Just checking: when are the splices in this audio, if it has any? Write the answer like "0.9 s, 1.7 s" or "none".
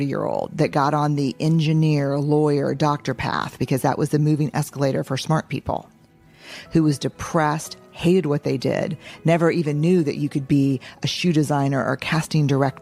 none